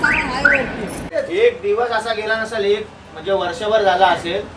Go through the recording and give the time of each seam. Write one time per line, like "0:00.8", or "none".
0:01.0